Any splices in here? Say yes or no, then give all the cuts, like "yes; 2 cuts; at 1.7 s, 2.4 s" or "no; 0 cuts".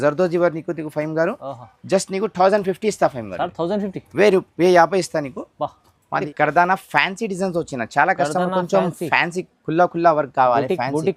yes; 1 cut; at 6.2 s